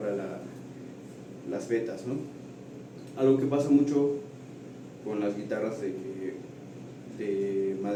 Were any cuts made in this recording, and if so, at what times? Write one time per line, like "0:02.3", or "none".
none